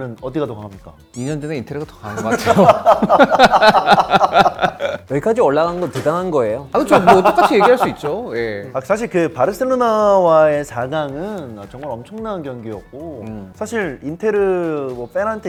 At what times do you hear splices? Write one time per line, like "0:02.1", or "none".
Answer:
none